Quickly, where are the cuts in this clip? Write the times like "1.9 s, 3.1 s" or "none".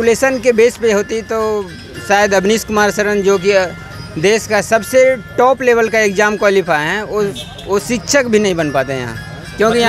none